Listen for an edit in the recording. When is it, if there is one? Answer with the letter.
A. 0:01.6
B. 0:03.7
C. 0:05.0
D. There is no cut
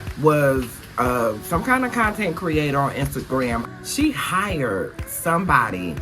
B